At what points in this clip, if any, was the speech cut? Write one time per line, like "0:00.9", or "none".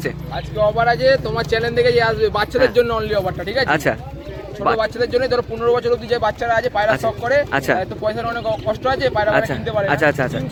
none